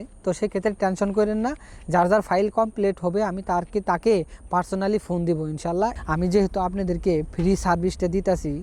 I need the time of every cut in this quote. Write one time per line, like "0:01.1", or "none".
0:06.0

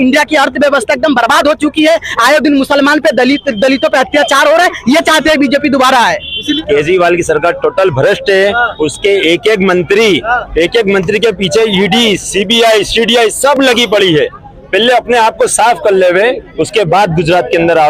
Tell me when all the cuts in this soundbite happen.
0:06.4

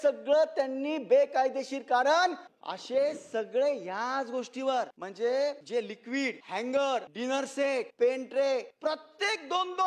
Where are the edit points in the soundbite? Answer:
0:02.5
0:05.0
0:06.0
0:07.5
0:08.7

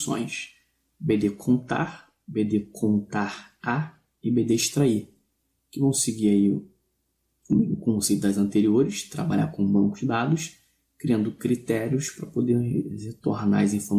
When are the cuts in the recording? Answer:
none

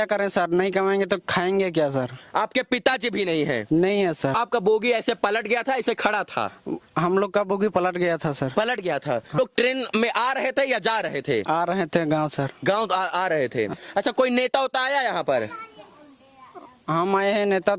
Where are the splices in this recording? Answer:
0:04.4
0:09.4
0:13.8

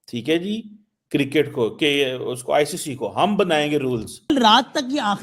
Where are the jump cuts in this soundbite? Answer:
0:04.3

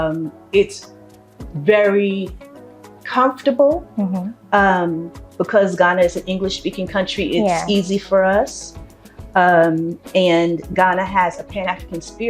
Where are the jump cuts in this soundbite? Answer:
none

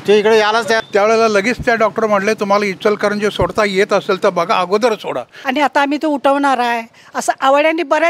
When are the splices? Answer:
0:00.8
0:05.3

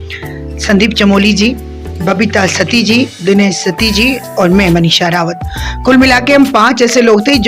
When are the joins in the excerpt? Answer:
none

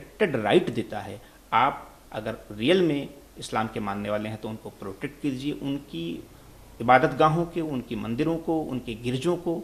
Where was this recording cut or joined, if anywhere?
none

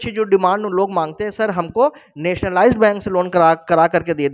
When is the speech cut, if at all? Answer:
none

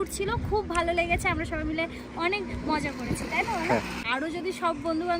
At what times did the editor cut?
0:04.0

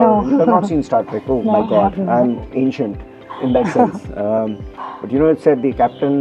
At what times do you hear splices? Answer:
none

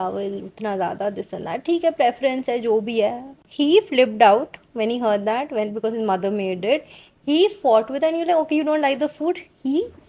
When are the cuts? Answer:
none

